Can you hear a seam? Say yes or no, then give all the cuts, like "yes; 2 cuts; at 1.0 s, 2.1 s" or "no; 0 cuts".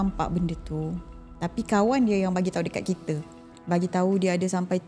no; 0 cuts